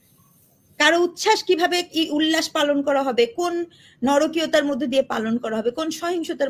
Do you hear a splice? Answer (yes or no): no